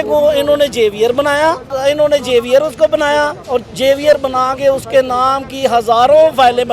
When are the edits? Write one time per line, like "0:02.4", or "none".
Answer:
0:01.7

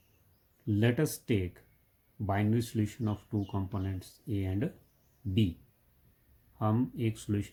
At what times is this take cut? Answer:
none

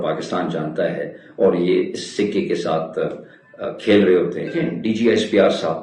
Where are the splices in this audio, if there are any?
0:04.6

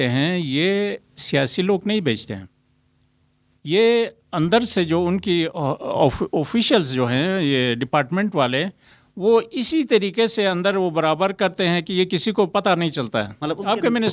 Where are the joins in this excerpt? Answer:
none

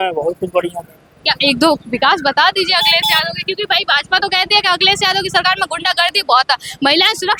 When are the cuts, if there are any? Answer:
none

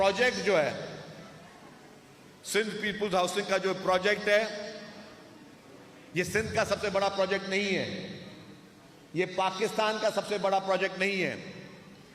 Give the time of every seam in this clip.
none

